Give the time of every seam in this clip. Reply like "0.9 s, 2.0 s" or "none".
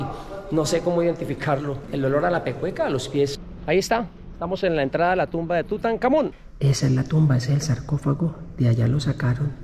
1.8 s, 3.4 s, 6.3 s